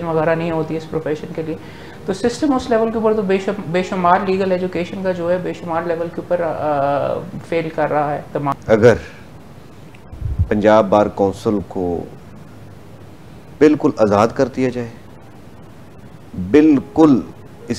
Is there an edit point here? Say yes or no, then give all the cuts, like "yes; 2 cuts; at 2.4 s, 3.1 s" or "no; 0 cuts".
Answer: yes; 1 cut; at 8.6 s